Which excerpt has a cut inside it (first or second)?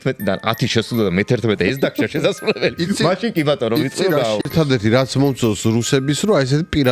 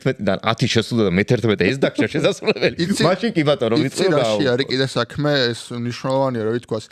first